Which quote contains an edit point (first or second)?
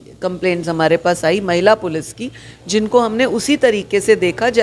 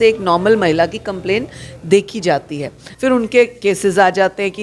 second